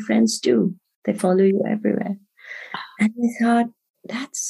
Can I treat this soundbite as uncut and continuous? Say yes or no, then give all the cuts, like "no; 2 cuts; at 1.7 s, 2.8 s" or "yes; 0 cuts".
yes; 0 cuts